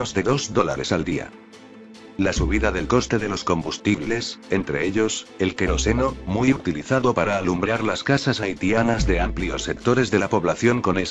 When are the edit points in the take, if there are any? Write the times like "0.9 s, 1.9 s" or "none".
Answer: none

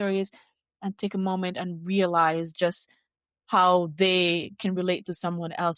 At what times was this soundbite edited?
none

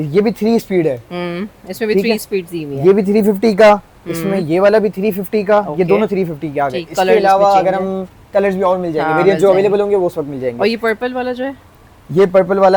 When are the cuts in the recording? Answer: none

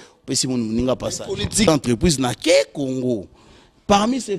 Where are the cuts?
1.7 s

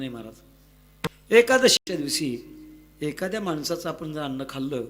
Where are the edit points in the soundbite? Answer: 1.1 s, 1.8 s

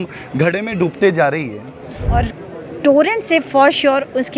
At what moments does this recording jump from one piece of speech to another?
2.0 s

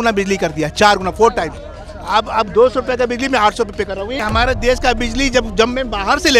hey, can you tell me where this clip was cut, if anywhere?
4.2 s

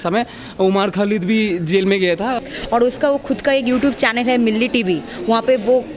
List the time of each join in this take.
2.4 s

